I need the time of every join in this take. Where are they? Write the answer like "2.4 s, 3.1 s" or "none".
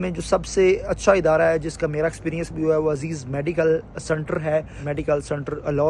4.8 s